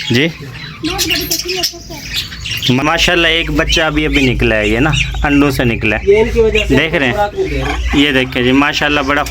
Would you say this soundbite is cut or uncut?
cut